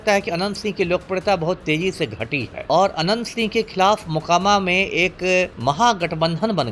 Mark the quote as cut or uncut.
cut